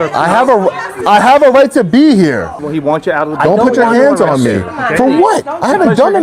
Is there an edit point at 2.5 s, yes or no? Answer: yes